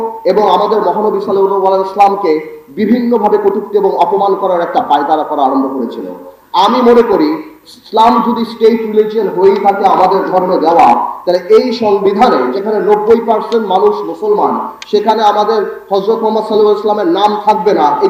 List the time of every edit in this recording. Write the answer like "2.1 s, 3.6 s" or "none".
none